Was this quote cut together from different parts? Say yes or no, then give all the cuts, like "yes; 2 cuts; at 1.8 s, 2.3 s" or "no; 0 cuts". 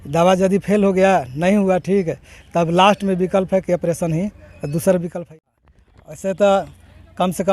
yes; 1 cut; at 5.3 s